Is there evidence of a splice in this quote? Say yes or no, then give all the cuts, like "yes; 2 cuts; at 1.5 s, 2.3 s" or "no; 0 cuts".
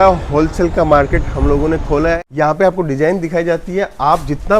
yes; 1 cut; at 2.2 s